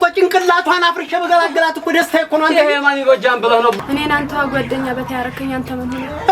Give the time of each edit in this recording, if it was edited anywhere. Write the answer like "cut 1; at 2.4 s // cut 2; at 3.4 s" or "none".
cut 1; at 3.8 s